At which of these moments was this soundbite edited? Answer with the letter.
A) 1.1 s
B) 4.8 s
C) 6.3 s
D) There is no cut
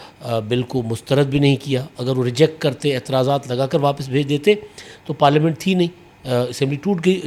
D